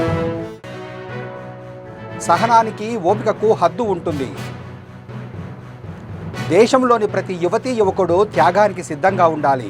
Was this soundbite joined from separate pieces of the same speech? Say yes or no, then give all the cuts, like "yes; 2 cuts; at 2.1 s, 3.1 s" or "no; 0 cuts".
no; 0 cuts